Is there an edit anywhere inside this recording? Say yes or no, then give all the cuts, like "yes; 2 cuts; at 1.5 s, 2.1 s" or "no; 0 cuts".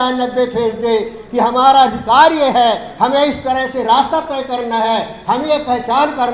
no; 0 cuts